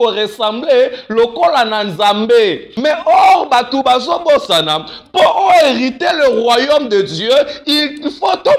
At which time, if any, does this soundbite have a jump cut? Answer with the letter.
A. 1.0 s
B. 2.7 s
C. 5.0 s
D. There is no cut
B